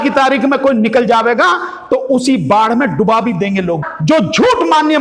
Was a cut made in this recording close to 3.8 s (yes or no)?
yes